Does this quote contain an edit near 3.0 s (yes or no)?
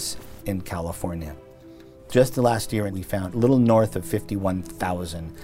yes